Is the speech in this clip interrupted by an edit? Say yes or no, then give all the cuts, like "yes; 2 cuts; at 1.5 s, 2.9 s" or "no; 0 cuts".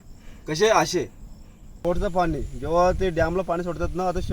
yes; 1 cut; at 1.8 s